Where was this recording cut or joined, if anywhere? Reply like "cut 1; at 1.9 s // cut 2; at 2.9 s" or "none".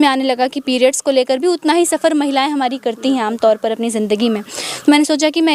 none